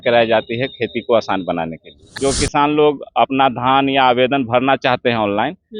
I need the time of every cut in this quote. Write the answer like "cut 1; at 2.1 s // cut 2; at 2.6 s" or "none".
cut 1; at 2.1 s